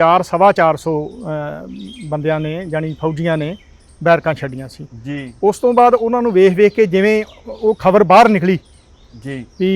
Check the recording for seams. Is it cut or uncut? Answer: uncut